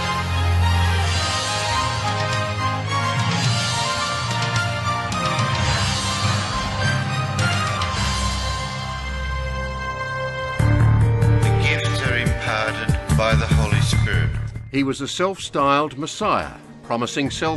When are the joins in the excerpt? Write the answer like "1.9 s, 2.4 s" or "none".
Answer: none